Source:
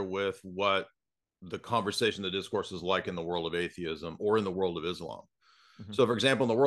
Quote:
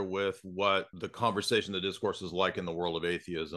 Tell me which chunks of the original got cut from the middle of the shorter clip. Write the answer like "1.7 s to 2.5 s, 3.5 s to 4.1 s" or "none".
1.0 s to 1.5 s